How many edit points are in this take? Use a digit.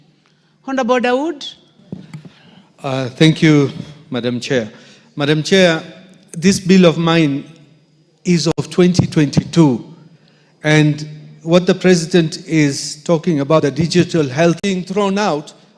1